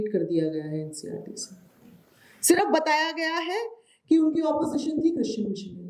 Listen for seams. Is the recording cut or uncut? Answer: uncut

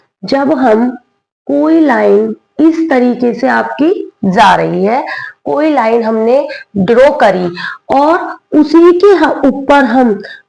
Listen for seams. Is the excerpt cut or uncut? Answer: uncut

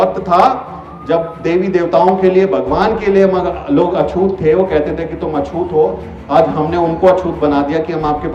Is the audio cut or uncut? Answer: uncut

